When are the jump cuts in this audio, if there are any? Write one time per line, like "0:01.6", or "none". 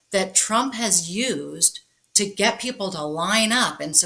none